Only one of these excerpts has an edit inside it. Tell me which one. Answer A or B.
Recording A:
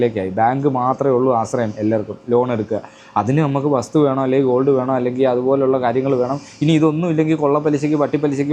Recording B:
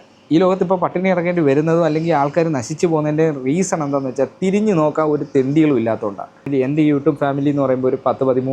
B